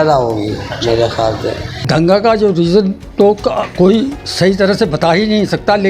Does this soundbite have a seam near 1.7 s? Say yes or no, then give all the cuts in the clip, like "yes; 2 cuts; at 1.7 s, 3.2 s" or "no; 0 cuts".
yes; 1 cut; at 1.7 s